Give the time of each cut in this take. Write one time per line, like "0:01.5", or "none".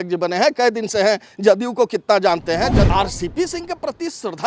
0:02.7